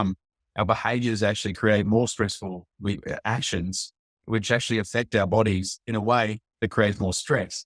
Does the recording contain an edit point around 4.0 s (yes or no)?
no